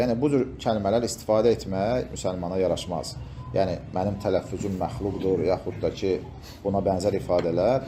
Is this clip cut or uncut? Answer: uncut